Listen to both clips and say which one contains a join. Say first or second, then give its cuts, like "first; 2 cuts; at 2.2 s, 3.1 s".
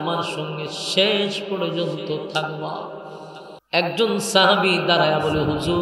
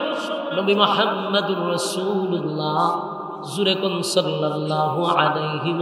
first; 1 cut; at 3.5 s